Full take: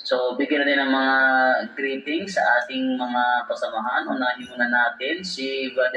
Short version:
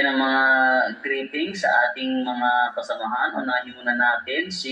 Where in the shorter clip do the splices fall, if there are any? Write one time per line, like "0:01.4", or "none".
none

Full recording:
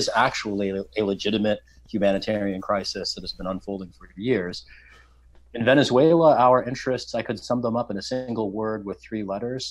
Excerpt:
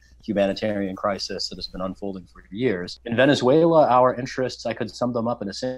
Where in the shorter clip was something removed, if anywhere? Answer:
0:02.9

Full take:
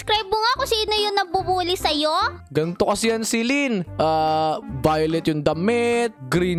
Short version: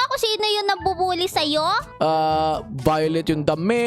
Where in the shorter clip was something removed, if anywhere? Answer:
0:01.9

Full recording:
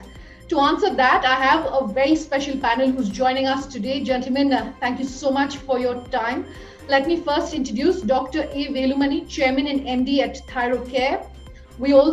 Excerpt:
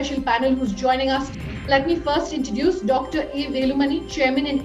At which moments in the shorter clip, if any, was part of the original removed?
0:01.4

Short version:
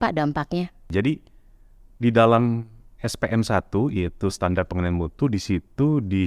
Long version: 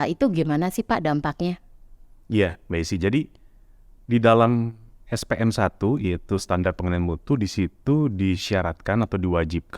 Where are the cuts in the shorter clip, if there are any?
0:00.9

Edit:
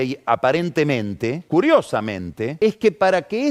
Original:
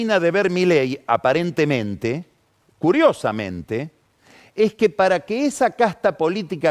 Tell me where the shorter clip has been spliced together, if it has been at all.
0:01.4
0:02.5

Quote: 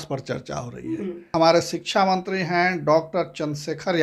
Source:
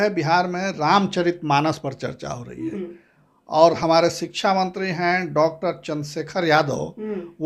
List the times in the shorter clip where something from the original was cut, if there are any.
0:01.3

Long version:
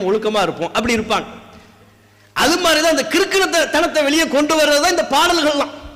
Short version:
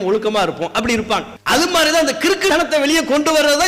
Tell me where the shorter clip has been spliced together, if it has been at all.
0:01.3
0:02.5

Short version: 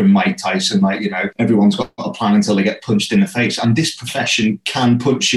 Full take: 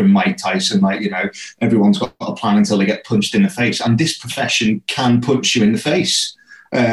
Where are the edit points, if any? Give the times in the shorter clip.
0:01.2

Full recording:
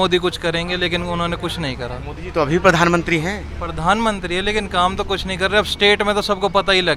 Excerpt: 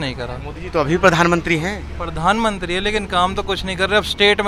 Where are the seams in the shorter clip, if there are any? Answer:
none

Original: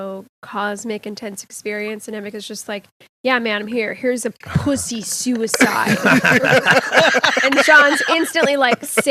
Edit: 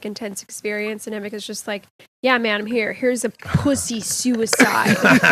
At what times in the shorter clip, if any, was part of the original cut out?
none

